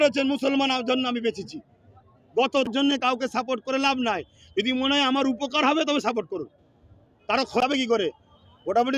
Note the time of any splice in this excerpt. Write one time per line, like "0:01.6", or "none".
0:02.7
0:07.6